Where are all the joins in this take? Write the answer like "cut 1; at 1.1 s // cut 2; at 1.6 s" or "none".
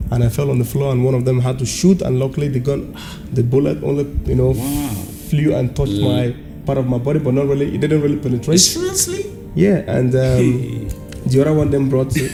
none